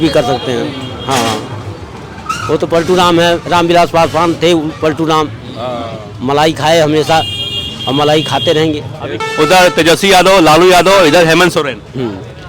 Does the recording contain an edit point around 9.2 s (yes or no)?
yes